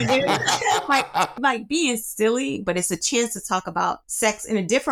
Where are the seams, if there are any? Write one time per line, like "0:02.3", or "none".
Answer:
0:01.3
0:02.6
0:04.1